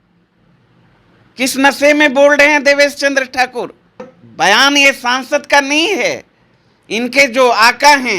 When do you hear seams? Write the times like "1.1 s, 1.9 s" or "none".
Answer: 4.2 s